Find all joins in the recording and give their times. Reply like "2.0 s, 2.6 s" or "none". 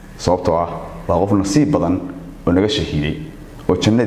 none